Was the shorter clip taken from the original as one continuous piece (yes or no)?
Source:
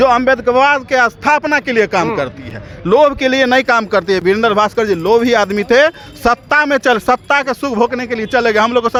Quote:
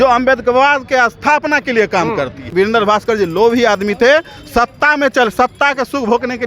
no